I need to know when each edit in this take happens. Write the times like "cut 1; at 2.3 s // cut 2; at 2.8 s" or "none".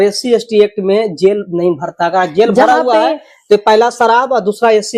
none

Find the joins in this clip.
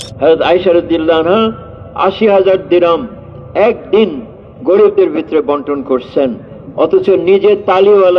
none

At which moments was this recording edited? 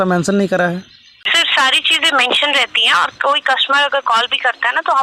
cut 1; at 1.4 s

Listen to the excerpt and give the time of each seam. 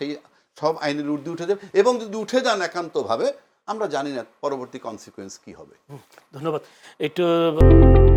none

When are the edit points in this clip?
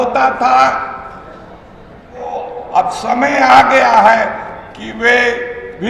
cut 1; at 2.3 s

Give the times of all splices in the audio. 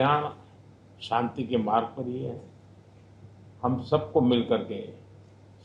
none

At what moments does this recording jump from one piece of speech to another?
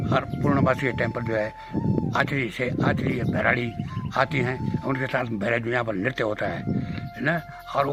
none

